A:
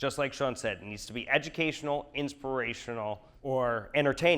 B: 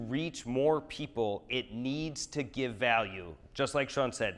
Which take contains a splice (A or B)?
A